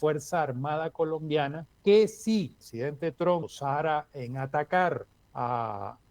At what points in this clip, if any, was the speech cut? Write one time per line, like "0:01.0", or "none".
0:01.7
0:02.6
0:03.5
0:05.2